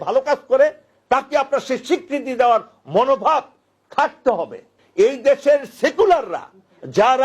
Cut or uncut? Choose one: cut